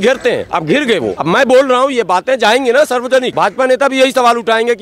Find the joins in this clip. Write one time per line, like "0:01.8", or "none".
0:01.2
0:03.3